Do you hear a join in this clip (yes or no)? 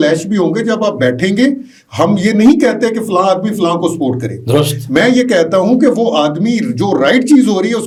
no